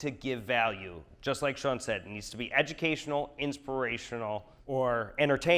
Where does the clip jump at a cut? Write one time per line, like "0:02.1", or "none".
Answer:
0:04.5

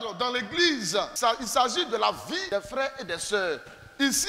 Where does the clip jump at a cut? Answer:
0:01.1
0:02.4

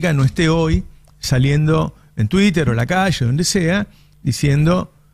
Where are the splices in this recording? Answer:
none

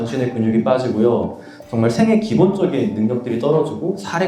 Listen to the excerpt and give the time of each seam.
none

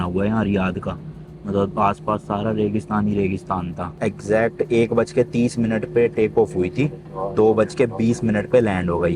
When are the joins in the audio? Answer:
none

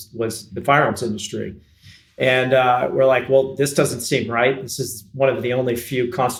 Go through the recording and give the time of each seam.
none

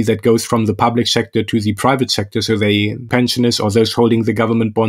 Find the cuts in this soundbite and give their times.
0:03.1

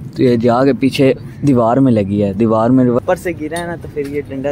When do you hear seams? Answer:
0:03.0

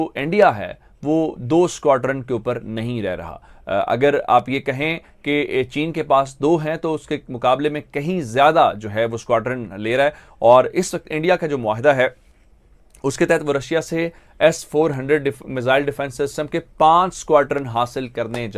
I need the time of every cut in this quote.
none

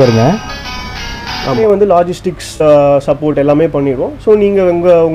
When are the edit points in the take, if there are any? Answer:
0:01.6

